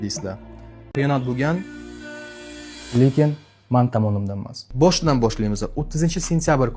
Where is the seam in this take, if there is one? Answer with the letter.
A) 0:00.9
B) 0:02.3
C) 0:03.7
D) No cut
A